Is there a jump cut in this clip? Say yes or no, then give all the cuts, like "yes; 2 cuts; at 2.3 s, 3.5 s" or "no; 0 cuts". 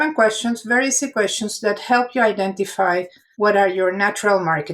yes; 1 cut; at 3.2 s